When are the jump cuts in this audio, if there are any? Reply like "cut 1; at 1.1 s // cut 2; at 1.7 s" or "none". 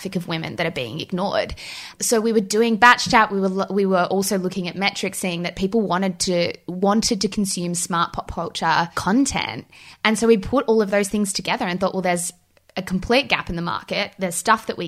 none